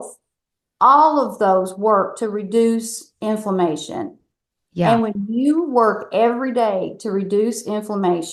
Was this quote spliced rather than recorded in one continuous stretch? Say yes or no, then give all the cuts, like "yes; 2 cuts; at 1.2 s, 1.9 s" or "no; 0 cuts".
no; 0 cuts